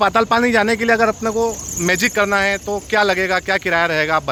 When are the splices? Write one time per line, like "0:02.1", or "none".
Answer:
none